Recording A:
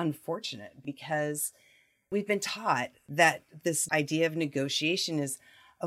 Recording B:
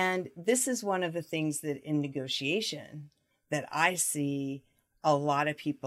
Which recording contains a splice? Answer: A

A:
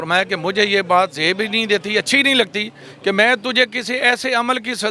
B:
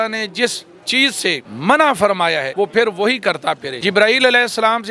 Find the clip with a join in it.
B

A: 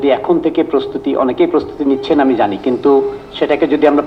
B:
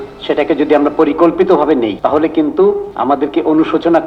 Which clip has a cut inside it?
B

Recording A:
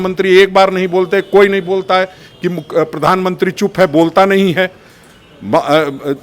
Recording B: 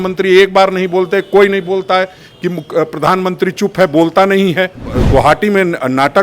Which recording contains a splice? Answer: B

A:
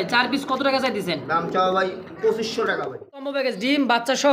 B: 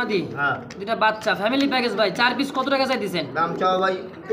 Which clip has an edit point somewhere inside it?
A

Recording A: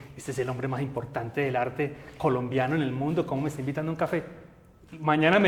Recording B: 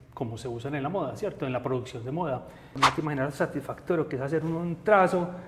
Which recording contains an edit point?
B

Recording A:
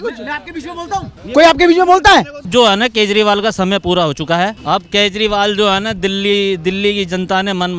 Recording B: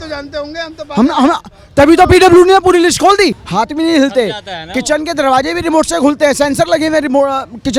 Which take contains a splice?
A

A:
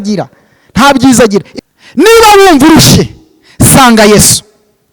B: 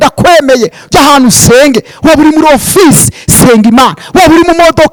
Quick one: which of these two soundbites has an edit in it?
A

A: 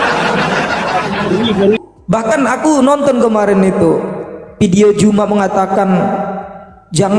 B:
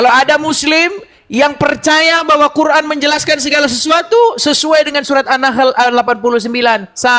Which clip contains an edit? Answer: A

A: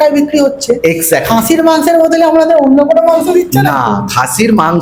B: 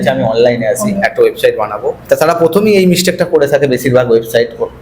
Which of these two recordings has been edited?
B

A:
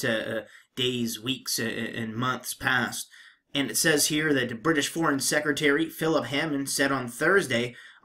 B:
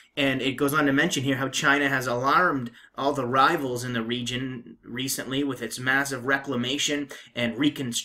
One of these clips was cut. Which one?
B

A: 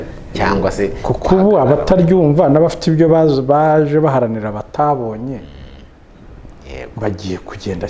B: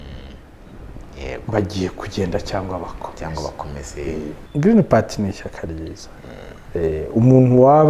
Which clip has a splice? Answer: B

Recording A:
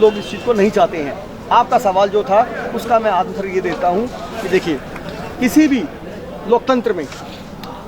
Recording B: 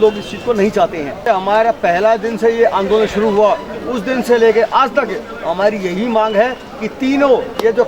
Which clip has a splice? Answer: B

